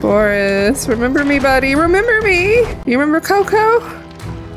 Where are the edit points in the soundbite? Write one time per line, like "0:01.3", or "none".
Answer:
0:02.8